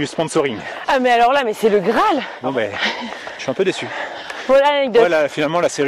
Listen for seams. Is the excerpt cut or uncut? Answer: cut